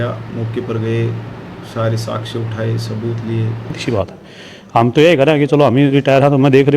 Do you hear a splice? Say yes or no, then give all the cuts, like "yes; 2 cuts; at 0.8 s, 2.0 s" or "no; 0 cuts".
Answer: yes; 1 cut; at 3.8 s